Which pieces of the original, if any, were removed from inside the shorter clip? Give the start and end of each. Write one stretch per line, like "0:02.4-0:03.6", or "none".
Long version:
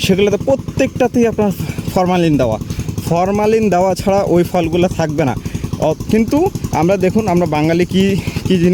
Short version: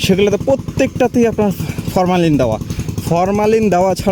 none